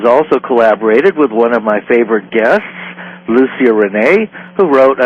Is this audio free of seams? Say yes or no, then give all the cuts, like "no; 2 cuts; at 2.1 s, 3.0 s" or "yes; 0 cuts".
yes; 0 cuts